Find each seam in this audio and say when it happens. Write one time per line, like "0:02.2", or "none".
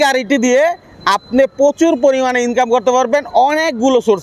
none